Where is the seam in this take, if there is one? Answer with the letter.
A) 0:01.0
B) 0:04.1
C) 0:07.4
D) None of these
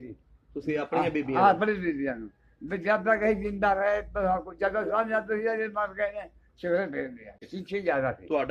C